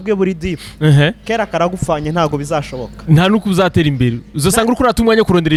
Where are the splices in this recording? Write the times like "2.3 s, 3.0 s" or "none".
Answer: none